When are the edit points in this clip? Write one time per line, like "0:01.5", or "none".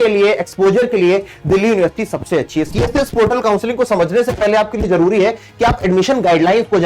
0:02.7